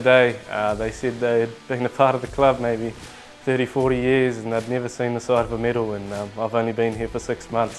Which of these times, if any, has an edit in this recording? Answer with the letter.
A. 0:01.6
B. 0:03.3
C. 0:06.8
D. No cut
D